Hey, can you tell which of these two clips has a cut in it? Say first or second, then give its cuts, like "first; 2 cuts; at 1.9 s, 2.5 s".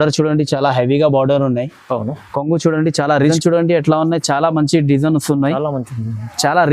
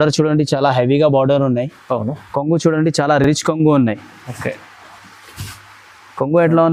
first; 1 cut; at 3.3 s